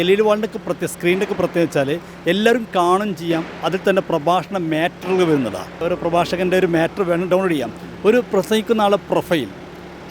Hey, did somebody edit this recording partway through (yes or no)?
yes